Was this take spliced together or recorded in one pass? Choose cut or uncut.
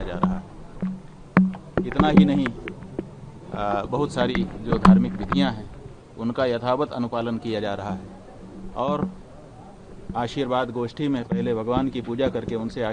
uncut